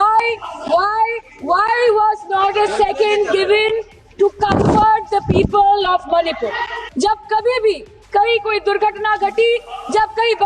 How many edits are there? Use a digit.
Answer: 1